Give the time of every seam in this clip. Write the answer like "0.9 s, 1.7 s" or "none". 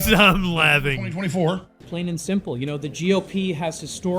1.8 s